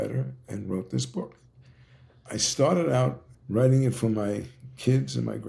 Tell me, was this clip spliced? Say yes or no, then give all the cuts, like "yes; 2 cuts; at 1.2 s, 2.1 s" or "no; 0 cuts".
yes; 1 cut; at 3.3 s